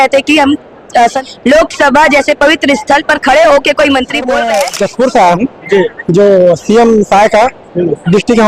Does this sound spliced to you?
yes; 2 cuts; at 1.2 s, 4.4 s

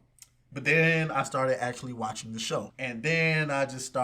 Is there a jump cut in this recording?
yes; 1 cut; at 2.7 s

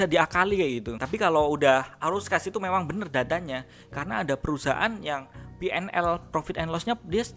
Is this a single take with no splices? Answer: no; 1 cut; at 0.9 s

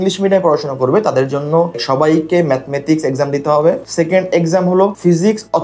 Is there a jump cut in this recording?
no; 0 cuts

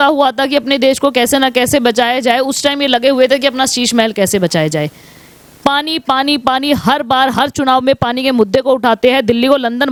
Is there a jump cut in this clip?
no; 0 cuts

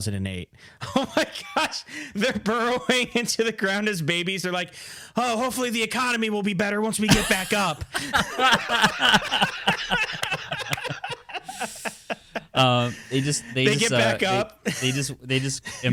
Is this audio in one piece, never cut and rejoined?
yes; 0 cuts

